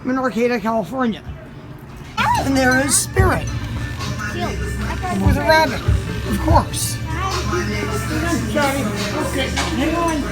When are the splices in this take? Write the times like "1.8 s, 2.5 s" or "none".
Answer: 2.0 s